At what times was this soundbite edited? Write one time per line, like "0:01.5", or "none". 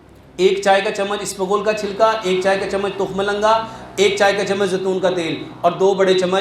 none